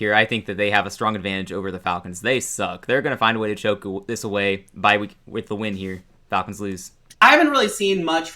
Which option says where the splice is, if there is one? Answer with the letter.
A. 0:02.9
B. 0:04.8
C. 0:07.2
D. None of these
C